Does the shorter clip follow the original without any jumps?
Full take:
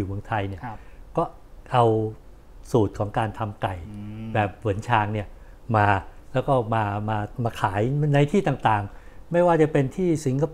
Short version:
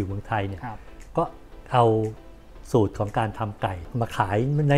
no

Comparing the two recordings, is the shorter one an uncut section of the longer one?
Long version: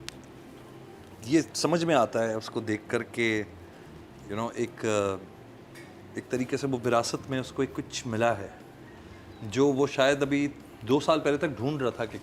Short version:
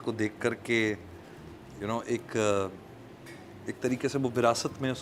yes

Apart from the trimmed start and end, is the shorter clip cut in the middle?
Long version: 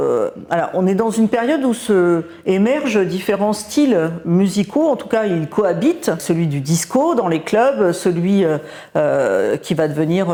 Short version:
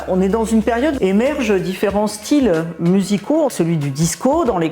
yes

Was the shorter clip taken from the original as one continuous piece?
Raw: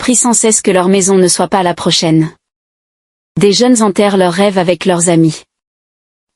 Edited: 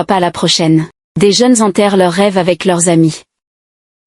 no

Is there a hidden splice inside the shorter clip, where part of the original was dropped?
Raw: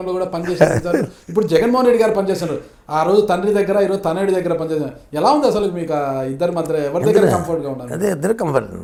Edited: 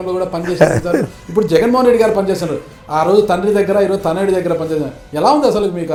no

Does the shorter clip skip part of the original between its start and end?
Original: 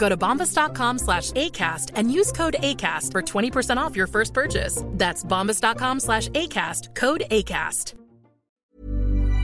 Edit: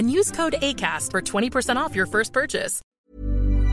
yes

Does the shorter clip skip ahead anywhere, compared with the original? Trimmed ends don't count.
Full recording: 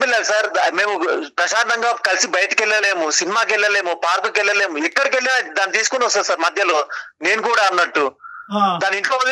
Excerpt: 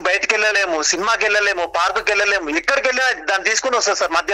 no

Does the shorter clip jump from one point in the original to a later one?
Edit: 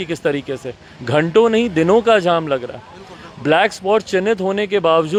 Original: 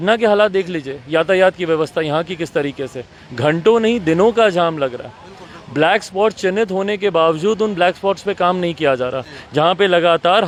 no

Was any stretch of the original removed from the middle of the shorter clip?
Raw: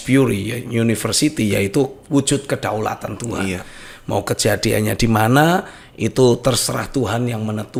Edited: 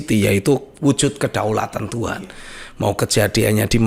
no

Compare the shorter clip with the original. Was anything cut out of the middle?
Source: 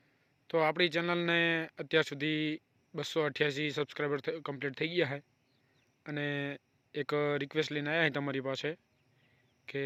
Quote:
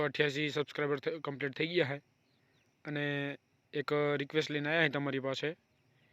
no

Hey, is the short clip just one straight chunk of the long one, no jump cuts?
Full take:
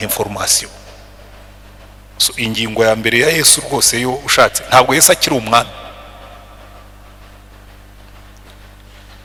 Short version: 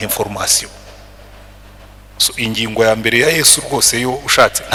yes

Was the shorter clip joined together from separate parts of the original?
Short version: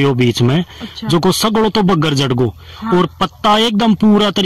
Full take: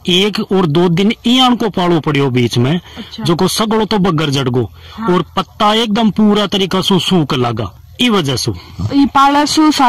no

